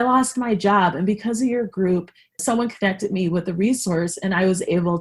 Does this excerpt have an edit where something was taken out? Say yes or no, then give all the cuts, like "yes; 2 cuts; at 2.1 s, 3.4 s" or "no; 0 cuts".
yes; 1 cut; at 2.2 s